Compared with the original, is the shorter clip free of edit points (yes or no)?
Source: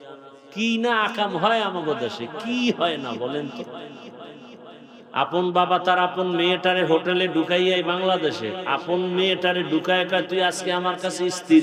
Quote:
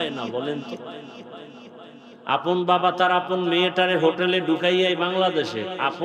yes